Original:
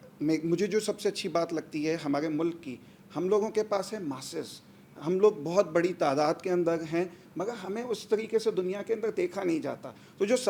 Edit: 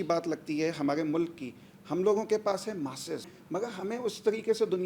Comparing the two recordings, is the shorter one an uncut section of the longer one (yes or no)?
no